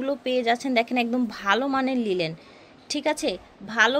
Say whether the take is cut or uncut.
uncut